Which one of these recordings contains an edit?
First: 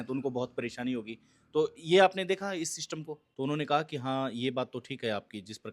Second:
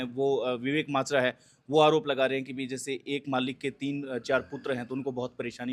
first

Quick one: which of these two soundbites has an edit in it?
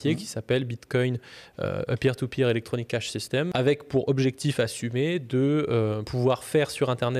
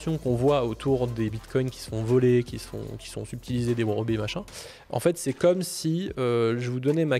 first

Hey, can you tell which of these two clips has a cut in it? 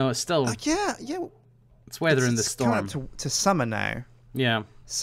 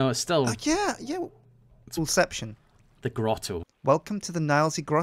first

